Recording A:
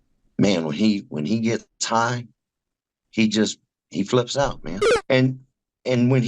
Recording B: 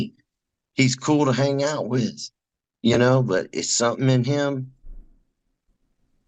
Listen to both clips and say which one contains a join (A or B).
A